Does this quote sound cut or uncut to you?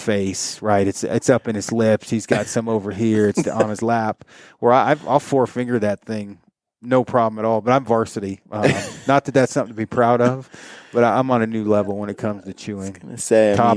uncut